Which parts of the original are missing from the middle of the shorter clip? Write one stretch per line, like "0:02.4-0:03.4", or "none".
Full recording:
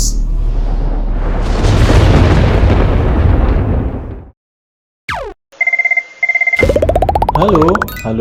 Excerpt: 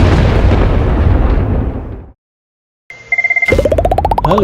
0:05.1-0:06.0